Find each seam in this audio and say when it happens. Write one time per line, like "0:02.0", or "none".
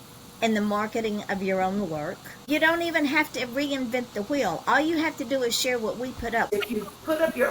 0:02.5
0:06.5

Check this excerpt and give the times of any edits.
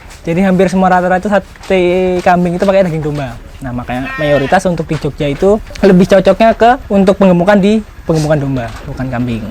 0:05.7
0:06.8

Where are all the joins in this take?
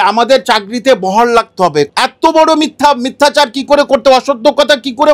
0:01.9

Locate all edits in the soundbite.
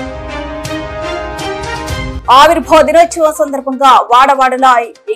0:02.1

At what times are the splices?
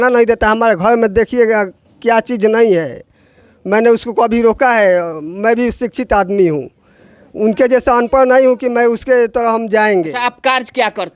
none

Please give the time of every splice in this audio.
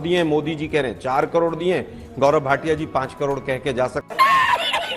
0:04.1

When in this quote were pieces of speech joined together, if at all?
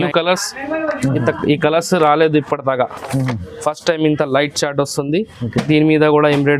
none

